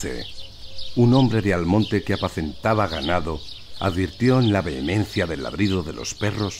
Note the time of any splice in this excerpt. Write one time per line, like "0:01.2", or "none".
0:01.6